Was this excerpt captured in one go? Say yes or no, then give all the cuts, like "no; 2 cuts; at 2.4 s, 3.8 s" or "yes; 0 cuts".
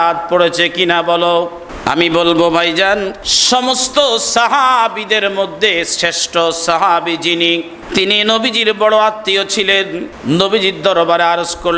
no; 4 cuts; at 1.6 s, 3.3 s, 7.8 s, 10.1 s